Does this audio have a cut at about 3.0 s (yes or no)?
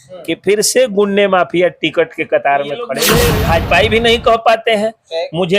yes